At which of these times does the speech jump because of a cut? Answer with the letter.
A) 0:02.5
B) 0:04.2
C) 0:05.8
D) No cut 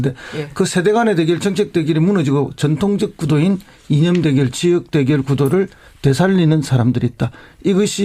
A